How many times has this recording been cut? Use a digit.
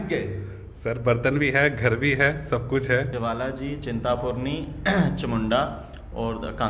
1